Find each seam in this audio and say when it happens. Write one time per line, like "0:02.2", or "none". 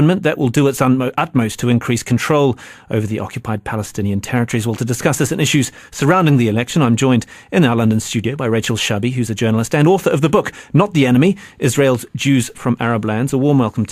0:11.5